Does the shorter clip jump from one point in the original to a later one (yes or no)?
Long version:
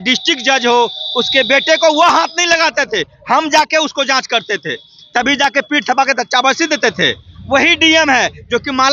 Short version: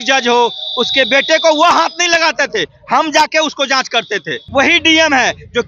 yes